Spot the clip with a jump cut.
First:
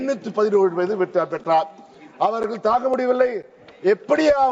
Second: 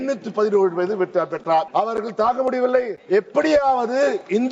second; 2 cuts; at 1.7 s, 3.0 s

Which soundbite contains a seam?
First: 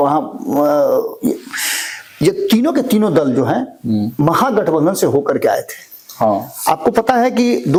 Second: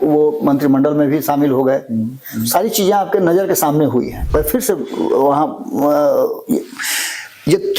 second; 1 cut; at 4.2 s

